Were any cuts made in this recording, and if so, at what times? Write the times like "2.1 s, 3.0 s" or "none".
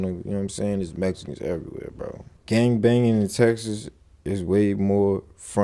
2.3 s